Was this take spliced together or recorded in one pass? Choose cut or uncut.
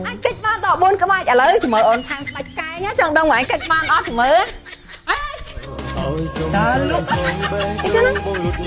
uncut